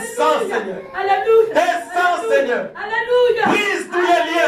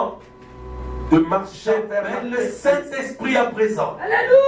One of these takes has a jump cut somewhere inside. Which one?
second; 1 cut; at 2.2 s

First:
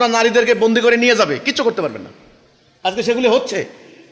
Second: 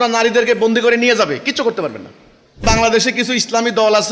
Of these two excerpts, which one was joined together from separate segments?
second; 1 cut; at 2.6 s

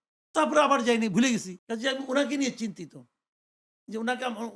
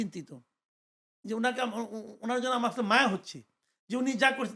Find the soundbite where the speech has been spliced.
first; 1 cut; at 1.6 s

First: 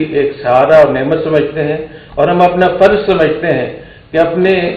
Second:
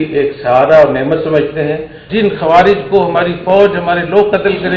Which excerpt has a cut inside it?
second; 1 cut; at 2.0 s

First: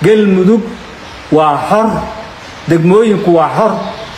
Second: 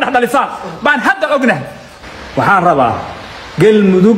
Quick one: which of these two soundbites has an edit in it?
second; 1 cut; at 2.0 s

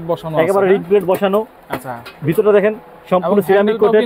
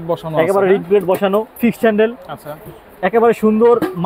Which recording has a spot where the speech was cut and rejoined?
second; 1 cut; at 1.6 s

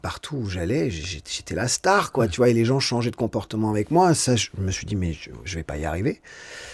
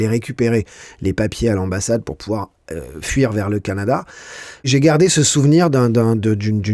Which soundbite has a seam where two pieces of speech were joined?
second; 1 cut; at 4.7 s

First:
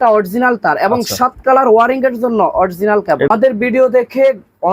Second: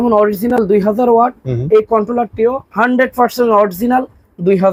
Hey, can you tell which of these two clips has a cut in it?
first; 1 cut; at 3.3 s

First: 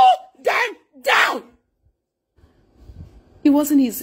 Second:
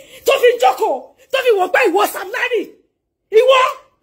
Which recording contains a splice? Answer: first; 1 cut; at 2.5 s

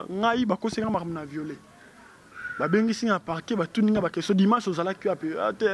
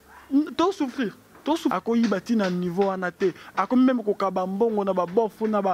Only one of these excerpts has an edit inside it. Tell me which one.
second; 1 cut; at 1.7 s

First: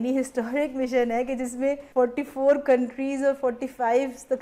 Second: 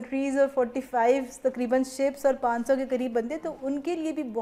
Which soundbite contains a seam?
first; 1 cut; at 1.8 s

